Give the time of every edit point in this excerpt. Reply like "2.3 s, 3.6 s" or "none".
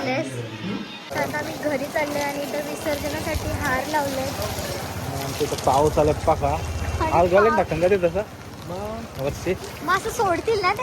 1.1 s